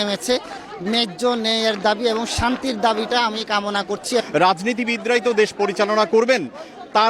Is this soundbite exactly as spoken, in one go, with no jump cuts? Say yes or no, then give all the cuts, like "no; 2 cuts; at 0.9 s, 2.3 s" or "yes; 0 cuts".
no; 1 cut; at 4.2 s